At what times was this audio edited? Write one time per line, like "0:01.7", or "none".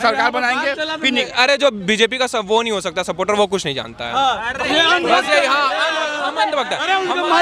0:01.3